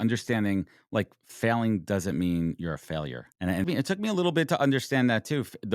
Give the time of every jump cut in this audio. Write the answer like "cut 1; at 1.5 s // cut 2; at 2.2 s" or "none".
cut 1; at 3.6 s